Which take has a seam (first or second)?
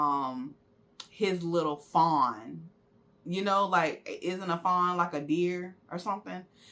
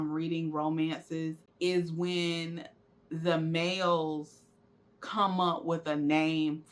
second